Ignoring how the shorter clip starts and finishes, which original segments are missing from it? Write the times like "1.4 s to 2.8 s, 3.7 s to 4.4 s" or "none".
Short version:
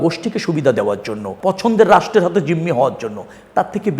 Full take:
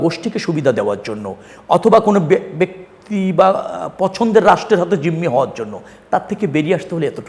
1.3 s to 3.8 s

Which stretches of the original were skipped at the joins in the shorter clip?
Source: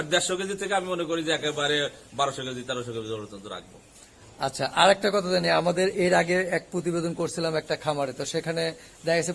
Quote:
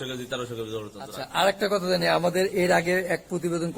3.6 s to 4.6 s

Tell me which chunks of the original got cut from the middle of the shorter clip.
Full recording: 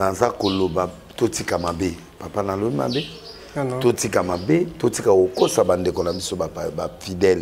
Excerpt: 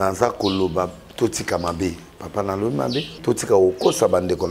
3.2 s to 4.7 s

